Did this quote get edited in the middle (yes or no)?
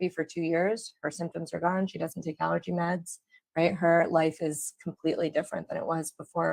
no